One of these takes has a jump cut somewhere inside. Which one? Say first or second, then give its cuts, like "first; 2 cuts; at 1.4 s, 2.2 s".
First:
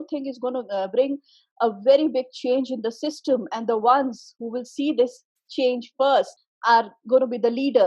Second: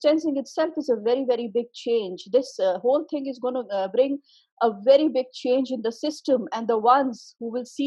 first; 1 cut; at 6.4 s